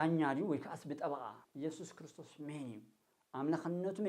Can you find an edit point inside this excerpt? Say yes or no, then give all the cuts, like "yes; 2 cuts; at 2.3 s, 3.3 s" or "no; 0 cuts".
yes; 1 cut; at 1.4 s